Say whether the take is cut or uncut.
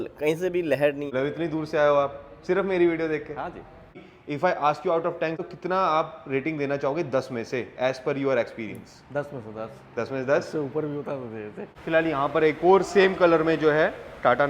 cut